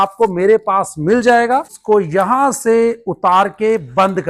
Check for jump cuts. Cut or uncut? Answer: cut